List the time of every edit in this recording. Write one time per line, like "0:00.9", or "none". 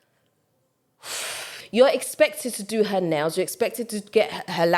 0:01.5